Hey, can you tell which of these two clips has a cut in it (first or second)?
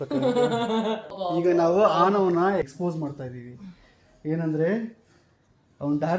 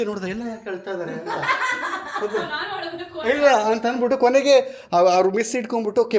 first